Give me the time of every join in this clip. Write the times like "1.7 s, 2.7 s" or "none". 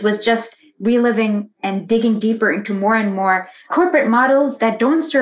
1.6 s, 3.7 s